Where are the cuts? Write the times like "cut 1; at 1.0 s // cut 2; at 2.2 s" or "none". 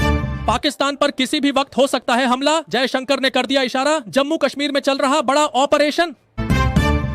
cut 1; at 2.5 s